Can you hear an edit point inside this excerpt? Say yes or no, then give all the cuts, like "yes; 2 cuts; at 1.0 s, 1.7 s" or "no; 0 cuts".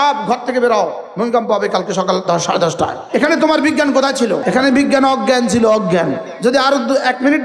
yes; 4 cuts; at 1.0 s, 3.0 s, 4.4 s, 6.2 s